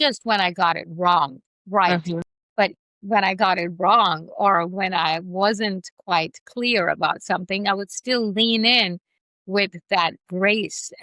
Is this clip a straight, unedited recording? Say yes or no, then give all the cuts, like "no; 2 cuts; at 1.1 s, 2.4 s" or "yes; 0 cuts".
yes; 0 cuts